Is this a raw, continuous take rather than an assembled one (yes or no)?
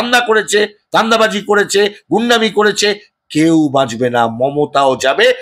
yes